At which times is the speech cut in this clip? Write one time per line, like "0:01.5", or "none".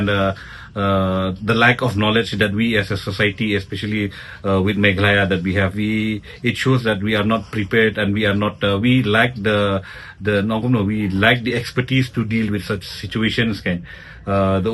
none